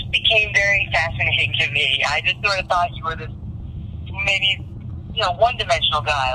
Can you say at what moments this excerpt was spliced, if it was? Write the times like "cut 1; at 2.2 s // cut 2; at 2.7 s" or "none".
none